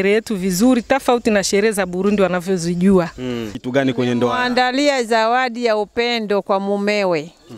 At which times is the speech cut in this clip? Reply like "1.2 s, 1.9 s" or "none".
3.5 s